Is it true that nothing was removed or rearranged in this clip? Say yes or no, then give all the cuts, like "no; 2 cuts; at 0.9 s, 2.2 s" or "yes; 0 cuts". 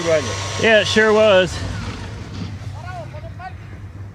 yes; 0 cuts